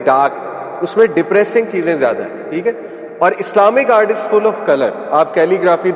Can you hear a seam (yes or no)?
no